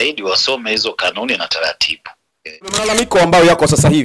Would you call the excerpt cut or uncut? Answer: cut